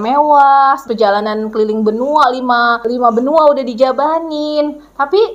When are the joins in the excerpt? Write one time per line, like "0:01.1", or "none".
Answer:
0:00.8
0:02.8